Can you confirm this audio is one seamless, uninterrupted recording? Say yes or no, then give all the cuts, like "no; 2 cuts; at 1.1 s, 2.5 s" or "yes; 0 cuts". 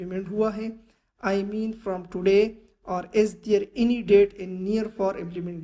yes; 0 cuts